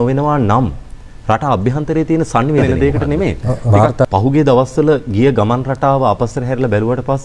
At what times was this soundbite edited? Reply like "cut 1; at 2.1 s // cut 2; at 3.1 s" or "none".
cut 1; at 2.6 s